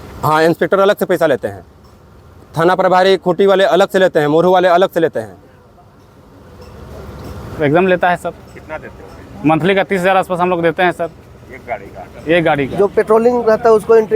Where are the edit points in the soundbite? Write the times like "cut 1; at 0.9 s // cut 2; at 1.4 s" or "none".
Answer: cut 1; at 7.4 s // cut 2; at 12.7 s